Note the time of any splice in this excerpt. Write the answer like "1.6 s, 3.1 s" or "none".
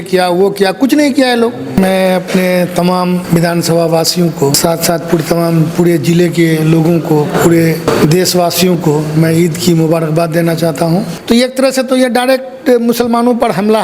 1.8 s, 3.2 s, 4.6 s, 7.9 s, 11.1 s